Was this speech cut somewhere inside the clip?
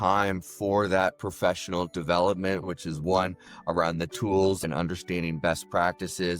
yes; 2 cuts; at 2.6 s, 4.6 s

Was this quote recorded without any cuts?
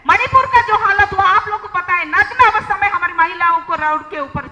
yes; 0 cuts

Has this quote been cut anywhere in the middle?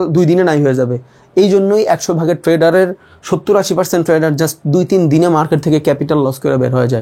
no; 0 cuts

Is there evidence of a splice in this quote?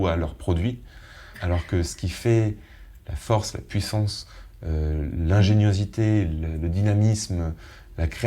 yes; 1 cut; at 1.4 s

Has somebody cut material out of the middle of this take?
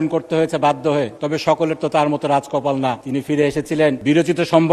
yes; 3 cuts; at 1.2 s, 3.0 s, 4.0 s

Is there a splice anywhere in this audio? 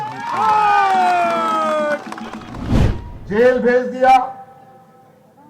yes; 1 cut; at 2.6 s

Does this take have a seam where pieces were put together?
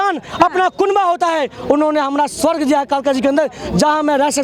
no; 0 cuts

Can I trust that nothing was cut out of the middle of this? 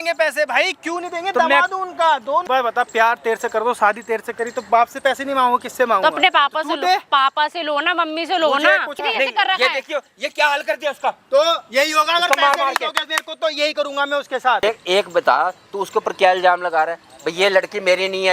no; 3 cuts; at 2.4 s, 9.0 s, 14.6 s

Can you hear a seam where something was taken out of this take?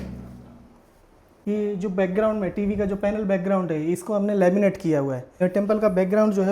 yes; 2 cuts; at 1.2 s, 5.4 s

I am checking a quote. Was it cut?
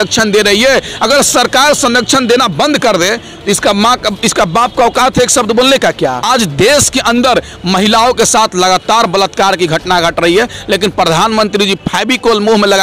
yes; 1 cut; at 6.2 s

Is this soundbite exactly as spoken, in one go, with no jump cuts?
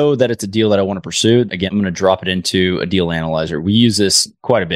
no; 1 cut; at 1.7 s

